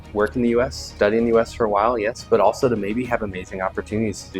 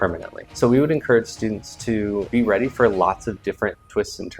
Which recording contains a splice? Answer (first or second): second